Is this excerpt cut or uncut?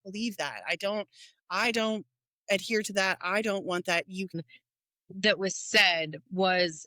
cut